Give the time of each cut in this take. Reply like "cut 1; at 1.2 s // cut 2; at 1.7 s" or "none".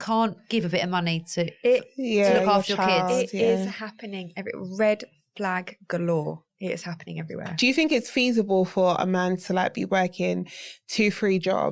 none